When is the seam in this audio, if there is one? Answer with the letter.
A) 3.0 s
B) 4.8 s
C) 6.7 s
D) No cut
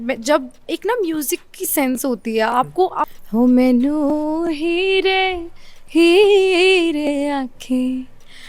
A